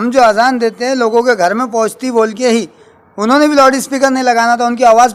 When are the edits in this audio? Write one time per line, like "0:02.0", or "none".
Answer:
none